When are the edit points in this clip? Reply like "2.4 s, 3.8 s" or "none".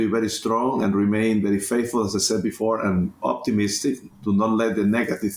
none